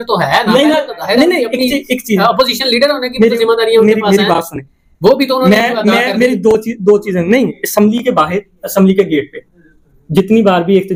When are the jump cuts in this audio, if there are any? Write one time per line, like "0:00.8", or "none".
none